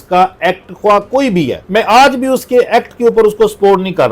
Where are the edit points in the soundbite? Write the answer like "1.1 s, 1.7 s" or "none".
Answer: 1.6 s